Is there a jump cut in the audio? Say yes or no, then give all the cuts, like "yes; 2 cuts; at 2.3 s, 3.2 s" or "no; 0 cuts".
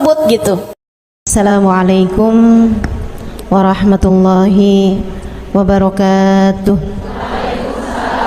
yes; 1 cut; at 1.3 s